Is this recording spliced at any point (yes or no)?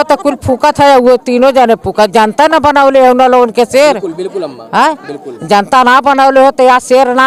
no